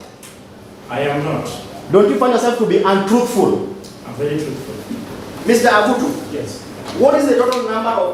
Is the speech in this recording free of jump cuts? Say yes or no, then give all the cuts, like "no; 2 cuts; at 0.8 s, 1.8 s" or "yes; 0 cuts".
no; 1 cut; at 5.2 s